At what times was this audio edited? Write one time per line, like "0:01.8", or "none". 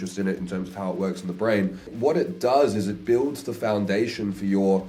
0:01.9